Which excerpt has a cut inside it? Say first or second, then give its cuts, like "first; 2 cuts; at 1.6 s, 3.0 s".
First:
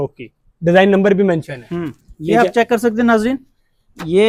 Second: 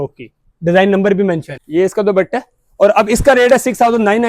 second; 1 cut; at 1.5 s